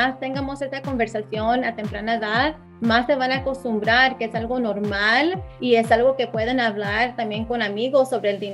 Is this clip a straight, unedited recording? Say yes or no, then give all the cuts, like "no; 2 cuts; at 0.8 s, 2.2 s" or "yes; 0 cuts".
no; 2 cuts; at 2.7 s, 5.5 s